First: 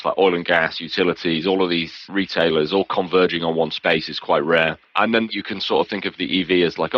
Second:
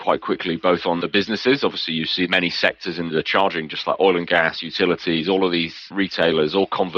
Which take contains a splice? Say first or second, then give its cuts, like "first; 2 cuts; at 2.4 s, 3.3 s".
second; 2 cuts; at 1.0 s, 2.3 s